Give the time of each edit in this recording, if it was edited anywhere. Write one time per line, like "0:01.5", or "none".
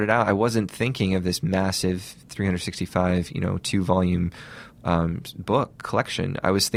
none

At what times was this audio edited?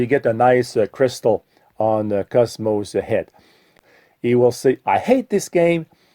0:03.7

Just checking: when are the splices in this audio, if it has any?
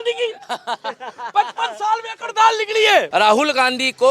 0:03.1

